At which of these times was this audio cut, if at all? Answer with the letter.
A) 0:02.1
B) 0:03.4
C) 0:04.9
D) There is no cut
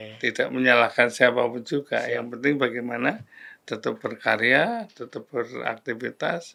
D